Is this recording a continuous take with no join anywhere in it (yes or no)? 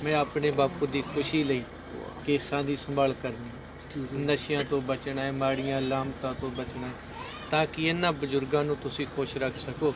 yes